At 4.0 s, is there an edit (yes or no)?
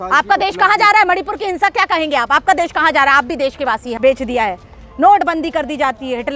yes